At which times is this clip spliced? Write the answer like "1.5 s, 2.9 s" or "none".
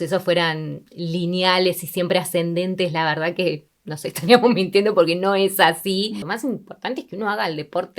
6.2 s